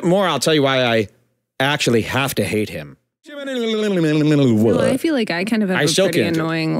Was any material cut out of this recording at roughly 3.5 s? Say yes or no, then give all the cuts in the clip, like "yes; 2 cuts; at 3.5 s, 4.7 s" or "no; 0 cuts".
yes; 1 cut; at 3.5 s